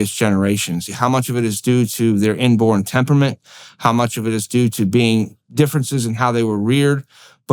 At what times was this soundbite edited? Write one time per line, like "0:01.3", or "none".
0:00.9